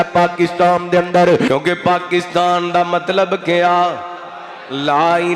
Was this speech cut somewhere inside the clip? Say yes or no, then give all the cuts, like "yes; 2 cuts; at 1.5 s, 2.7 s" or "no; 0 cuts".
yes; 1 cut; at 1.5 s